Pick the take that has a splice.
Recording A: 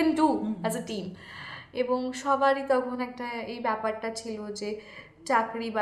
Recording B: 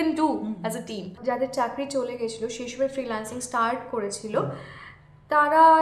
B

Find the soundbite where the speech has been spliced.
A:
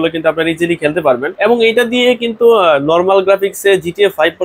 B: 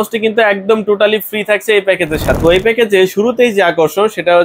B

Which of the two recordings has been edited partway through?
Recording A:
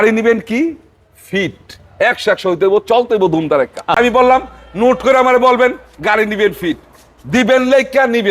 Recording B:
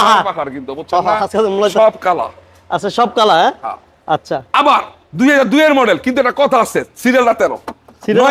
A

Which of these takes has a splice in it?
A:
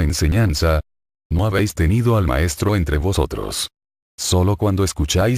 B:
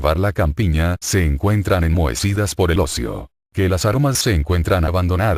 A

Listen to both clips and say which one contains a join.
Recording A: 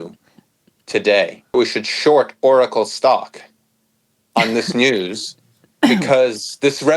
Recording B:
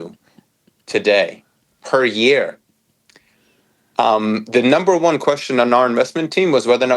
A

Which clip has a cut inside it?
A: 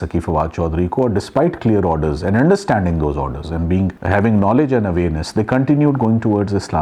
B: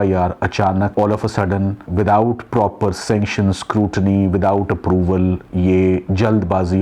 B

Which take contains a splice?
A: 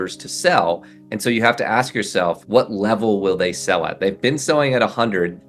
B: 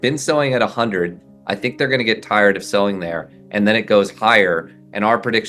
A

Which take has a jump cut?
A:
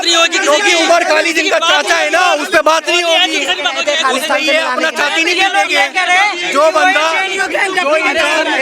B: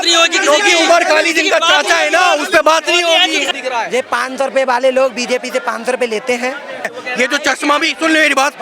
B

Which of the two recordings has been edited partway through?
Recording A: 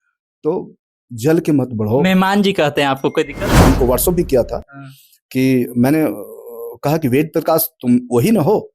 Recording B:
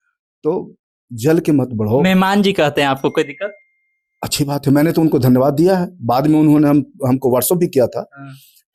A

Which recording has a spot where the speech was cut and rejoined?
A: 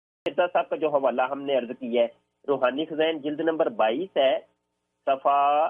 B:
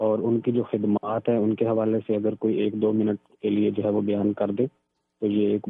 A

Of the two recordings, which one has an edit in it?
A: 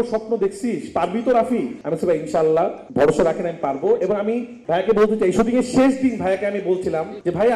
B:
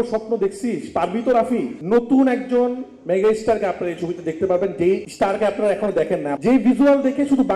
B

